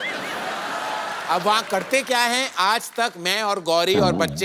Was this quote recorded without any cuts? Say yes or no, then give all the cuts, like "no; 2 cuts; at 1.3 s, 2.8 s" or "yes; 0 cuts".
yes; 0 cuts